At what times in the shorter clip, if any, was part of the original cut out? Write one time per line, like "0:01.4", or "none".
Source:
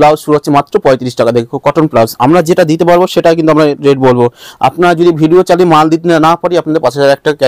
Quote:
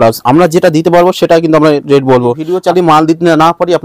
0:02.5